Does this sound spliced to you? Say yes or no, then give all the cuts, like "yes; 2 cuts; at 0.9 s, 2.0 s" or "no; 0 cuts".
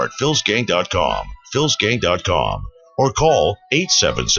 yes; 1 cut; at 1.2 s